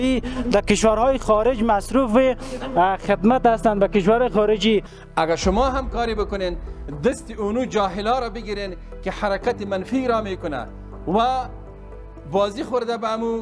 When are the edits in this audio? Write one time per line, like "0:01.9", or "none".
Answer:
0:05.0